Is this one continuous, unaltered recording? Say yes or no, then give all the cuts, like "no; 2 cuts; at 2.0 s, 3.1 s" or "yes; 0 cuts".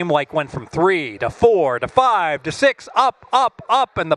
yes; 0 cuts